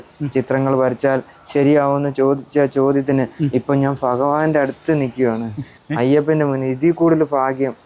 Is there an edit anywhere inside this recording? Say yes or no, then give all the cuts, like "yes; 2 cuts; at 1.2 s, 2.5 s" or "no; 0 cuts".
no; 0 cuts